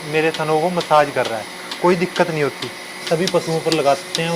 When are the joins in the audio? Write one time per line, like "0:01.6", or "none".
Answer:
0:03.0